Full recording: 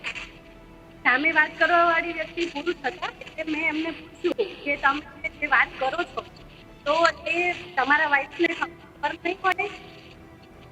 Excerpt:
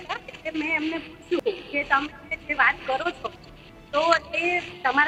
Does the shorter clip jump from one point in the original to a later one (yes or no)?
no